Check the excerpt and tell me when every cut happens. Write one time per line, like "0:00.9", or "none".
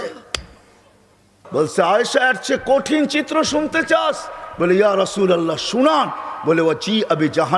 0:01.3